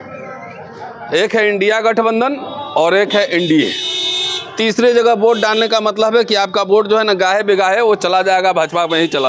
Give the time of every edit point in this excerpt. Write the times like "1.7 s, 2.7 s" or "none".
none

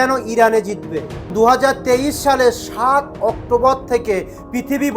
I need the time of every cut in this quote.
1.3 s

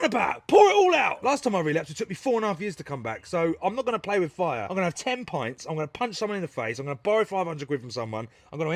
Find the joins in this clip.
1.2 s, 4.7 s

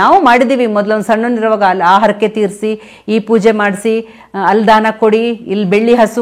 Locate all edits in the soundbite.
none

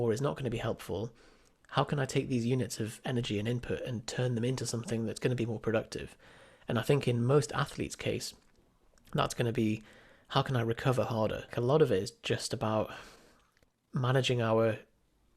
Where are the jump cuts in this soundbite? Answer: 11.5 s

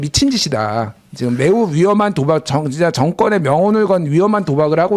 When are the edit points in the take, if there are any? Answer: none

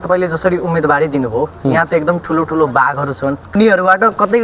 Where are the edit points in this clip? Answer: 3.5 s

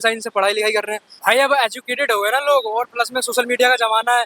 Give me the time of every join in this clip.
1.0 s

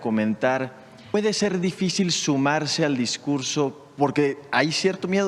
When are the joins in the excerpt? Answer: 1.1 s, 3.8 s

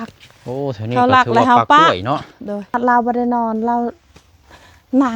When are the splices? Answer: 2.7 s

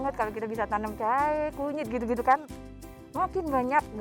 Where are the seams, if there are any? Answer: 2.7 s

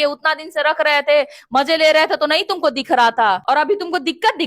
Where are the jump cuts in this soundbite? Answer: 3.4 s

